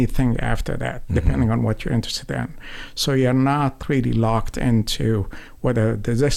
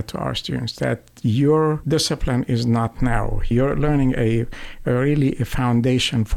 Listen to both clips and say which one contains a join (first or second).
second